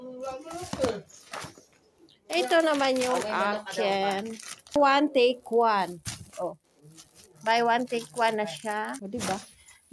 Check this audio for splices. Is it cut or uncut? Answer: cut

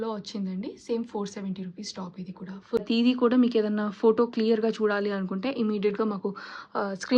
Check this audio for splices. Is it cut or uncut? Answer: cut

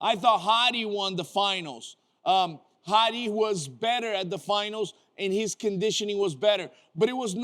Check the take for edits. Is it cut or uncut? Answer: uncut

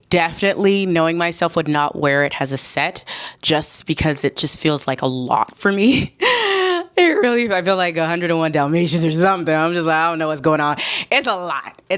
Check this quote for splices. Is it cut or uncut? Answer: uncut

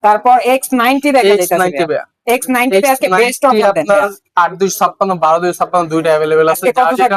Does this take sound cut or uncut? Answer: uncut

